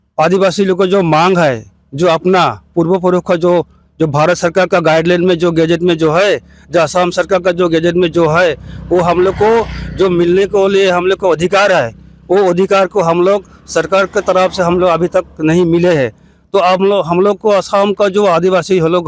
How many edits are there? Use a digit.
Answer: 0